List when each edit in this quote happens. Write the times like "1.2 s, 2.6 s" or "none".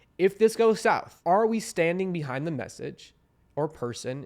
1.1 s